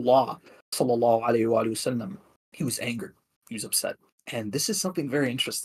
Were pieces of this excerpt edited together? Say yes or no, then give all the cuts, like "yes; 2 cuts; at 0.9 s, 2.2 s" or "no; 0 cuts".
no; 0 cuts